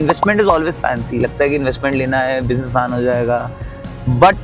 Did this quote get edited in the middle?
no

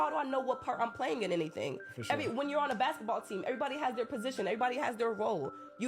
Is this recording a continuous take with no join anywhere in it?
no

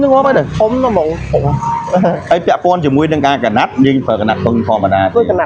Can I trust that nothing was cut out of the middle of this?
yes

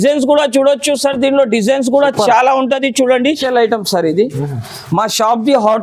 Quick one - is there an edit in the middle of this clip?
yes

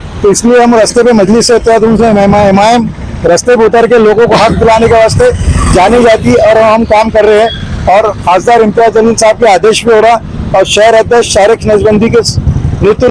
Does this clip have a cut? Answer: no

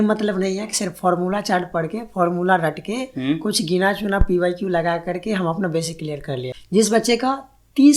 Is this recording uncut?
no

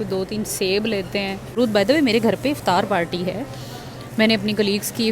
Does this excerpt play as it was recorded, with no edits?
no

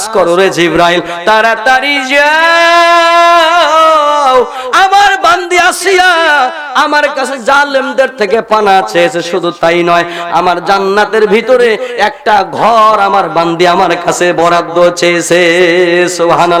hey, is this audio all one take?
yes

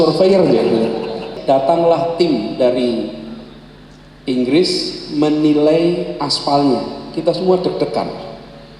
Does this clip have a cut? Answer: yes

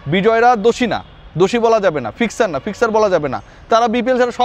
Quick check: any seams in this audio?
no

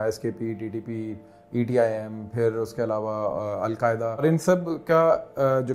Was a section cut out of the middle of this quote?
yes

